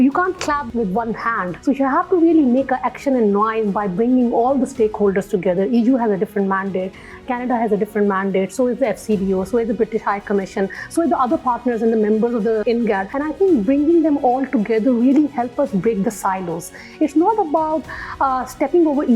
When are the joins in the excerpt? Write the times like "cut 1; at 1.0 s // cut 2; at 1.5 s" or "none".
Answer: cut 1; at 0.9 s // cut 2; at 12.8 s